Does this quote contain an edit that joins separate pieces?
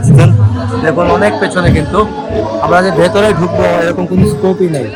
no; 0 cuts

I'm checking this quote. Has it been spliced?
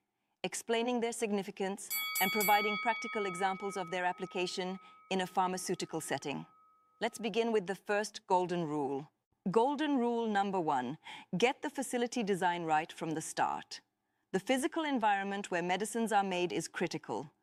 no; 0 cuts

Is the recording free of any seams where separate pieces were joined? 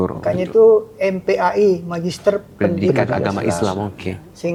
yes; 0 cuts

